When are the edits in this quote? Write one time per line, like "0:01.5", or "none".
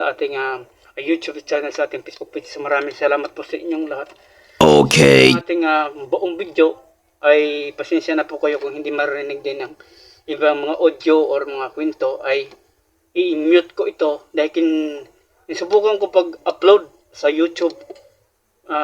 0:04.5
0:05.4